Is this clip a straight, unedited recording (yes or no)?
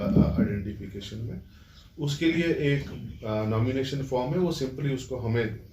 yes